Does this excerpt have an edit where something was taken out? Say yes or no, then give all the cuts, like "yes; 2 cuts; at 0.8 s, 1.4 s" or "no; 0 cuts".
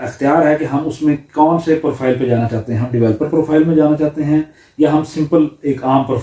no; 0 cuts